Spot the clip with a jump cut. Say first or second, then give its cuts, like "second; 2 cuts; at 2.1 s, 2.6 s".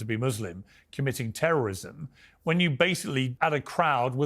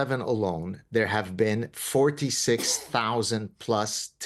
first; 1 cut; at 3.3 s